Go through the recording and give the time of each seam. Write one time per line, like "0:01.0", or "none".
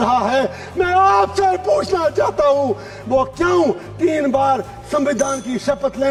none